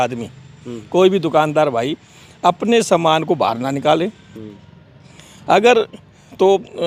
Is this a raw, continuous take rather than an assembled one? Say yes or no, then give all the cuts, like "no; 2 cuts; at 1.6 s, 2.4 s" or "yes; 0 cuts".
yes; 0 cuts